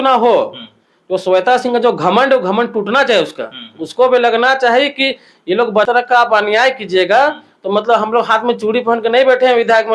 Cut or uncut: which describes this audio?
cut